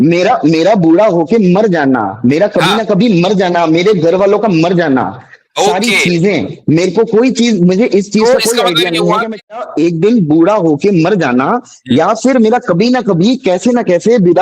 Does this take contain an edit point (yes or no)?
yes